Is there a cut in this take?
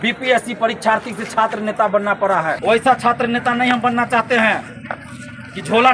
yes; 1 cut; at 2.6 s

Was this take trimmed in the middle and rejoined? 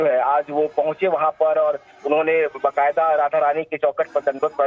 no; 0 cuts

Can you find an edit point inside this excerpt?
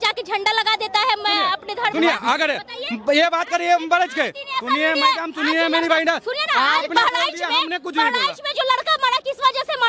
no; 0 cuts

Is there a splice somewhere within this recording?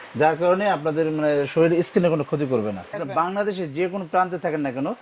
yes; 1 cut; at 3.0 s

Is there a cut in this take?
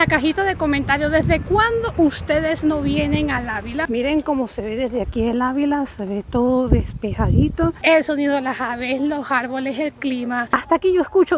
yes; 3 cuts; at 3.9 s, 7.8 s, 10.4 s

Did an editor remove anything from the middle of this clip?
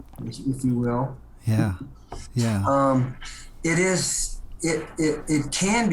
no; 0 cuts

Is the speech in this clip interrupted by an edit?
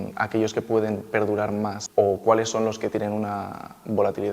yes; 1 cut; at 1.8 s

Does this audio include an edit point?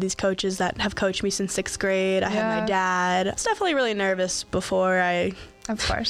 yes; 1 cut; at 3.4 s

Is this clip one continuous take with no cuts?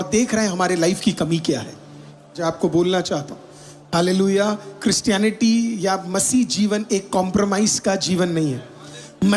no; 1 cut; at 2.4 s

